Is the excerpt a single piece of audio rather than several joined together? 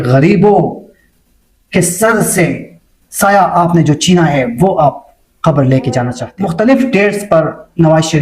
no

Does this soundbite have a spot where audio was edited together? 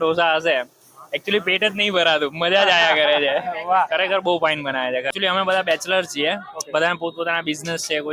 no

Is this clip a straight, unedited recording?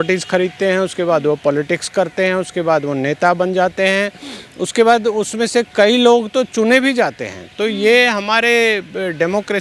yes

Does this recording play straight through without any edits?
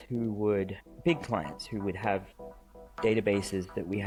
yes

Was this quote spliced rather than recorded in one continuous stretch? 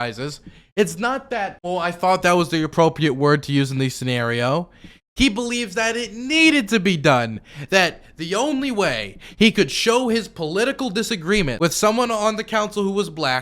yes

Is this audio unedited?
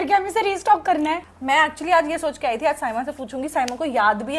no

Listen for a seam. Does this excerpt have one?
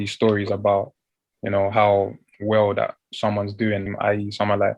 yes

